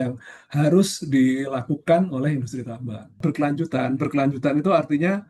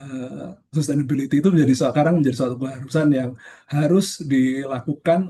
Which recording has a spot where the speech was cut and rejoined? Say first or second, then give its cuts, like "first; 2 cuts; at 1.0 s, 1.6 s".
first; 1 cut; at 3.1 s